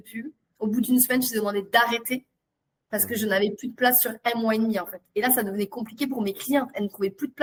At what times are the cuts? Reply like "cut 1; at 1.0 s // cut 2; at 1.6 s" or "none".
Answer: none